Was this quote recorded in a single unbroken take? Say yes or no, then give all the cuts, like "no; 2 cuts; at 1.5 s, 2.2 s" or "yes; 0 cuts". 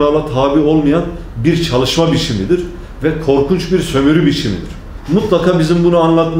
no; 1 cut; at 4.9 s